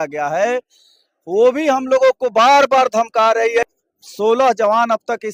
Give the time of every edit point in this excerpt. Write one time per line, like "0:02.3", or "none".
0:03.7